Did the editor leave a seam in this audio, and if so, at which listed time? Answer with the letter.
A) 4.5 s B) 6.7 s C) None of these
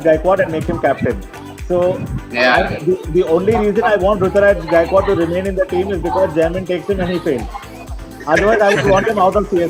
C